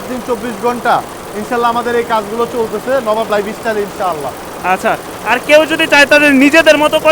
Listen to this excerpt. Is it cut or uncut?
uncut